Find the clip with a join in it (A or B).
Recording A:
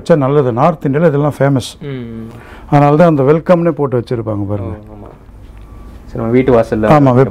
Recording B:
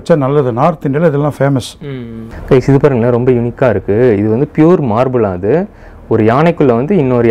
B